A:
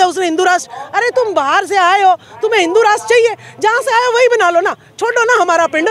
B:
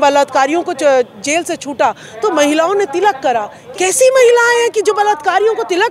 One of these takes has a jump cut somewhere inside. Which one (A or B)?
B